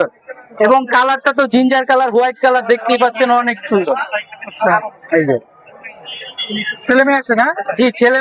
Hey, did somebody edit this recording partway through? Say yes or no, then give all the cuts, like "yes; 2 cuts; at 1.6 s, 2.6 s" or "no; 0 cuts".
no; 0 cuts